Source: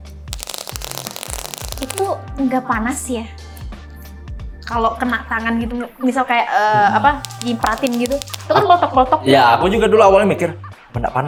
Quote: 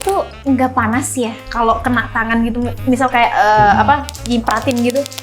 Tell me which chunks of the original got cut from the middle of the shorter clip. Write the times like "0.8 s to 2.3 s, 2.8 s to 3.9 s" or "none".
3.3 s to 4.6 s